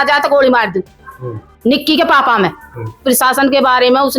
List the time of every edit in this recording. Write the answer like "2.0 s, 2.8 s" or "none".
3.0 s

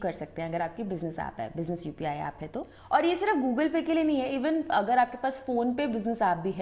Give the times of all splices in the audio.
2.8 s

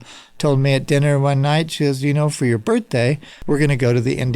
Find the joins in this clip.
3.3 s

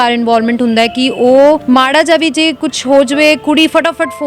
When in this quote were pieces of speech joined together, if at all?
1.6 s

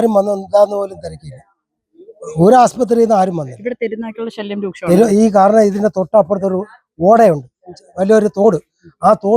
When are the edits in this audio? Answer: none

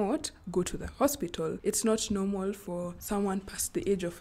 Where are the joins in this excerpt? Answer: 1.6 s, 3.0 s

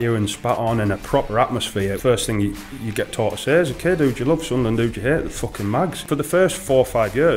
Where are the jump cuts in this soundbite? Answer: 2.0 s, 6.0 s

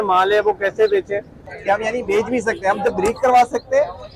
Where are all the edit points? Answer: 1.5 s

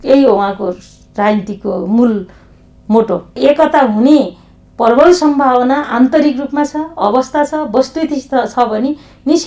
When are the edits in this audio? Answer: 3.4 s

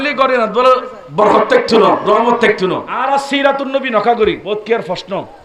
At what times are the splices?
2.9 s, 4.4 s

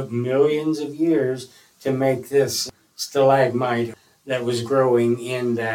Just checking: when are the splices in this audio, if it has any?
2.6 s, 3.9 s

